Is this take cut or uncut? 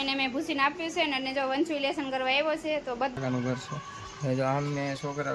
cut